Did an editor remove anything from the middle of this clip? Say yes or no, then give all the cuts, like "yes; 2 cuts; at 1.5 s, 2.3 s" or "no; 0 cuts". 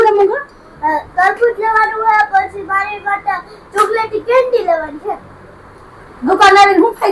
no; 0 cuts